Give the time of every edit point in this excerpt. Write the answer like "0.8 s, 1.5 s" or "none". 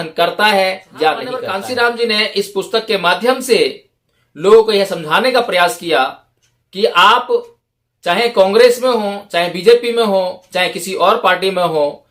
1.5 s